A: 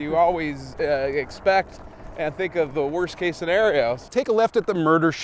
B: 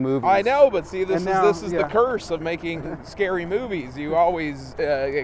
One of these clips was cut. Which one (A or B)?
A